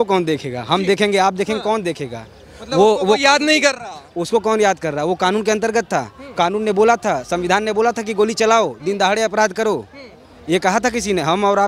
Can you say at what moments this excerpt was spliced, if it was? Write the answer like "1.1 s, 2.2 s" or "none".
none